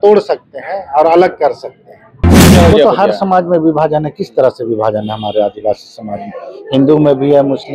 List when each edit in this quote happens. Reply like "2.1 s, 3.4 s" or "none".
2.5 s